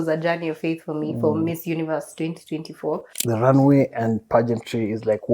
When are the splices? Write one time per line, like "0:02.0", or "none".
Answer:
0:03.1